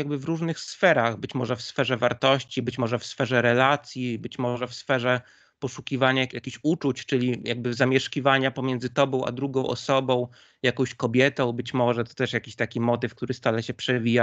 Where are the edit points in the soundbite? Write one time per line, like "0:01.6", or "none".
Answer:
0:06.4